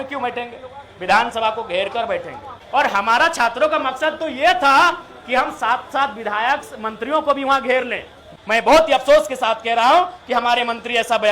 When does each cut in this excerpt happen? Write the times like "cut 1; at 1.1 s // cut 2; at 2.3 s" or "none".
cut 1; at 2.6 s // cut 2; at 8.3 s